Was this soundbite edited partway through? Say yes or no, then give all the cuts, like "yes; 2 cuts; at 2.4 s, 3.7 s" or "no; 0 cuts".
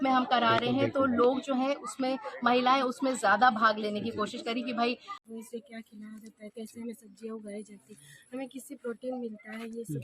yes; 1 cut; at 5.1 s